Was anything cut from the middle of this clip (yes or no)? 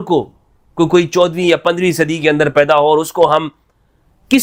no